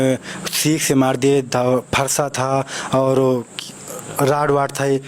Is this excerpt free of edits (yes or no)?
yes